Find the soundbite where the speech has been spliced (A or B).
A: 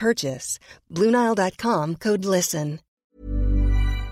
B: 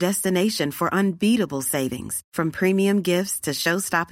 A